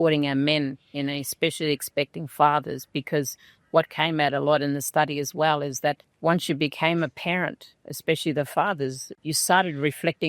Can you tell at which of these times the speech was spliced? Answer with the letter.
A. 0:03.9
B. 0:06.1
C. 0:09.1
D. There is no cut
C